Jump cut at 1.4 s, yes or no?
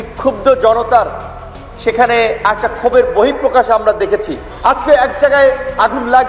no